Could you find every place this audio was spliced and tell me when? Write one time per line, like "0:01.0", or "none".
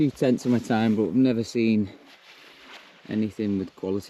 none

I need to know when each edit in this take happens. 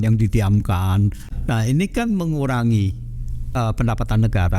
0:01.2
0:03.5

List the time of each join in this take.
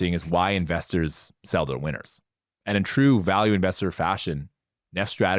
none

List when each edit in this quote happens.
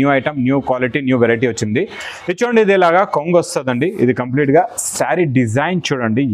none

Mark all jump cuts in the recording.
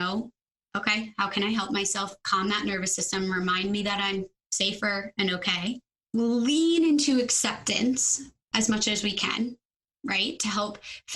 0:05.9
0:08.4

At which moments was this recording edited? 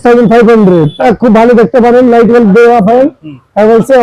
0:01.0

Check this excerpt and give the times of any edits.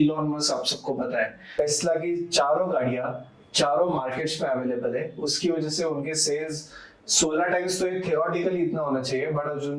0:01.6

